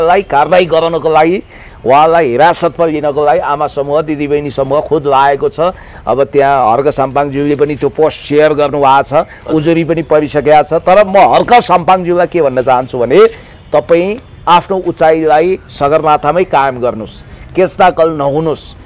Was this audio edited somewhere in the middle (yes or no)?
no